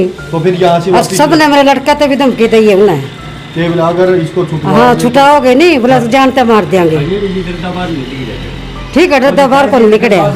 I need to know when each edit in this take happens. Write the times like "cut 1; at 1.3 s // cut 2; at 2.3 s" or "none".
none